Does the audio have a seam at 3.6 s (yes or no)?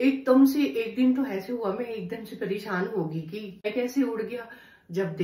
yes